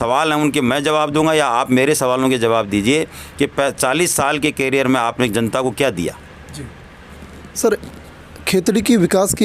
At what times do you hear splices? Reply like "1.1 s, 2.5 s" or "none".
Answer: none

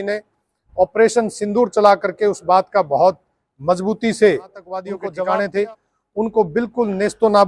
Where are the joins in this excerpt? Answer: 5.0 s

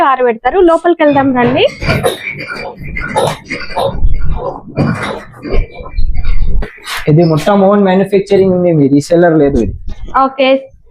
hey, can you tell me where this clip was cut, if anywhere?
1.8 s, 6.8 s

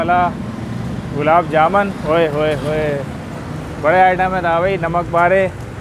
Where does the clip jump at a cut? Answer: 2.0 s

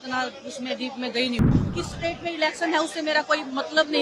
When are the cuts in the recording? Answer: 1.5 s

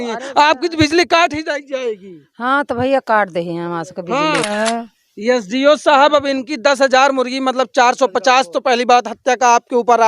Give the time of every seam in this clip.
4.5 s

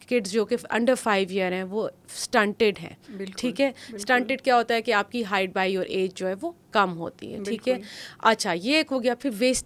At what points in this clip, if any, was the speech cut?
none

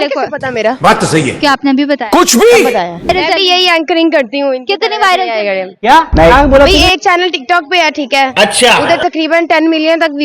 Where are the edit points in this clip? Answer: 3.1 s

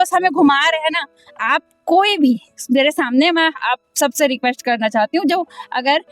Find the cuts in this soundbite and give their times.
none

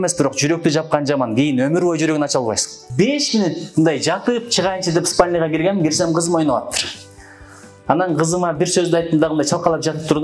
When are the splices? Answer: 2.8 s

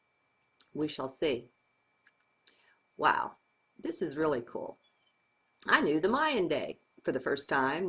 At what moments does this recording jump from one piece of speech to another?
6.9 s

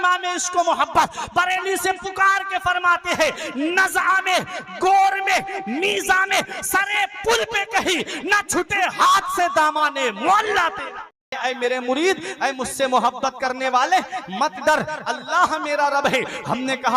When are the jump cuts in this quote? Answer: 11.3 s

